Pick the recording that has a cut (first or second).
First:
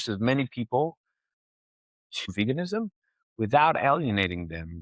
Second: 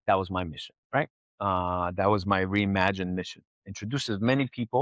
first